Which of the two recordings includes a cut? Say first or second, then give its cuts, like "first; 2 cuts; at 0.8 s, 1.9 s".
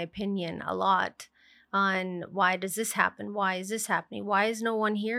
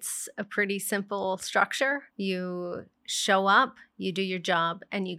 second; 1 cut; at 2.1 s